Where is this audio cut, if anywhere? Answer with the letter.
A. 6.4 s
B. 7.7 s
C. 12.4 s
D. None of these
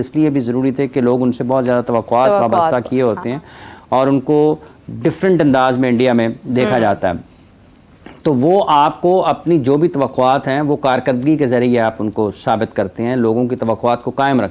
D